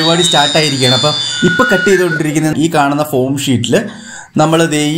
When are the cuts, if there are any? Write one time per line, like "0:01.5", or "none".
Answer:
0:02.5